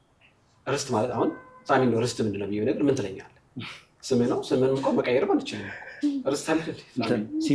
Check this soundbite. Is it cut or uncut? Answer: uncut